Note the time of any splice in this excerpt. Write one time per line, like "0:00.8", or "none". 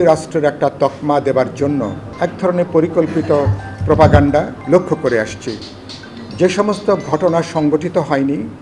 0:02.0
0:04.6